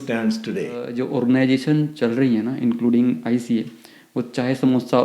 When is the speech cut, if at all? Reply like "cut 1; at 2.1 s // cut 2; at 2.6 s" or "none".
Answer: cut 1; at 0.9 s